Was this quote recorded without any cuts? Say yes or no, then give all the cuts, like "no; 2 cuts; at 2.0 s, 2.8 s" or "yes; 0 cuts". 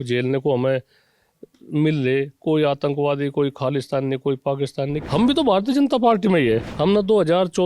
no; 2 cuts; at 5.0 s, 6.7 s